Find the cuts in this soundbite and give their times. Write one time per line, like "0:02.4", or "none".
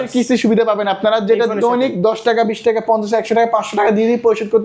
none